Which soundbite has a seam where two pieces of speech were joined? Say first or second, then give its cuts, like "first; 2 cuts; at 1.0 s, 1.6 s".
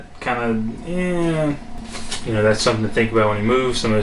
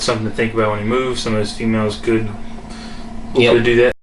first; 1 cut; at 1.7 s